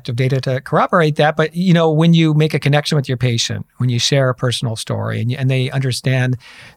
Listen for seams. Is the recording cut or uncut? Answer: uncut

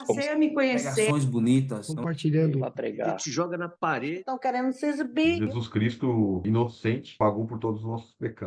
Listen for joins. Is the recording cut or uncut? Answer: uncut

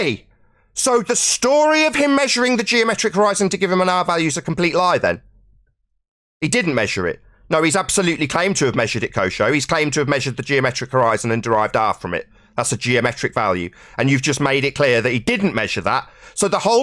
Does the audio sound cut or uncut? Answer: uncut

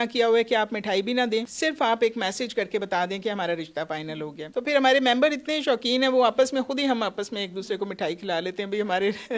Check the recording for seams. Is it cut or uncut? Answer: cut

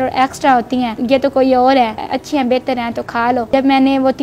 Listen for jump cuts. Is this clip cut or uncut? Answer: cut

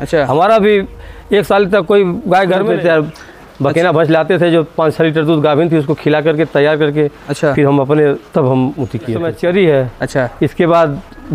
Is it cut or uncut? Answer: cut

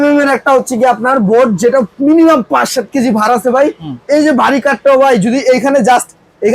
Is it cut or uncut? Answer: uncut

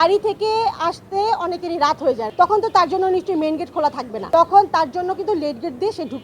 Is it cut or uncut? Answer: cut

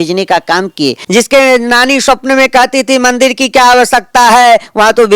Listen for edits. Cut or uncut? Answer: cut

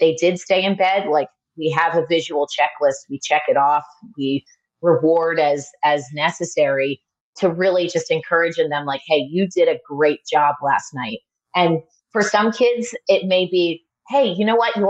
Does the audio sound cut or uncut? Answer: uncut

